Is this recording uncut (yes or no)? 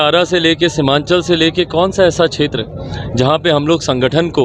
yes